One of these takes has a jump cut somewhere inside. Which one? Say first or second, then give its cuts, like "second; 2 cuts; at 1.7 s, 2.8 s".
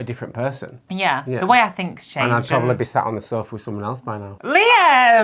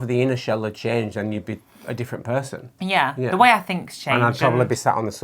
first; 1 cut; at 4.3 s